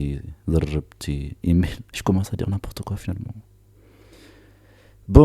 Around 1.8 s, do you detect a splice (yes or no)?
yes